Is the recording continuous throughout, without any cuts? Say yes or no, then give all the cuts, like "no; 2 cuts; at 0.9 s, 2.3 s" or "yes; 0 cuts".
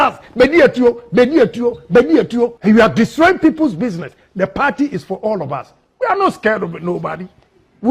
no; 1 cut; at 2.6 s